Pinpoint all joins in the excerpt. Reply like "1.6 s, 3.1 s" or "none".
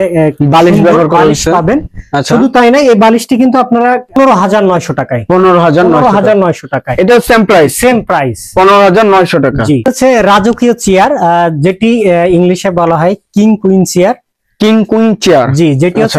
4.2 s, 9.9 s